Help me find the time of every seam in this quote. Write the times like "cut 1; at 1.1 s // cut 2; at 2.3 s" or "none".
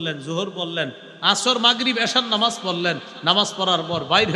none